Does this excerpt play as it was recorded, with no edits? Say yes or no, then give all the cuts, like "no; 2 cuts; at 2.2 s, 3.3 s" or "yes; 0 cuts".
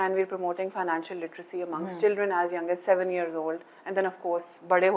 yes; 0 cuts